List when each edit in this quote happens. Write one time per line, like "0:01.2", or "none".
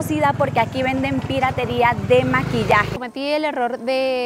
0:03.0